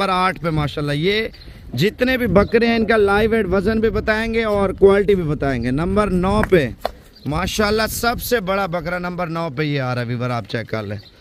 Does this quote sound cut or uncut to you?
uncut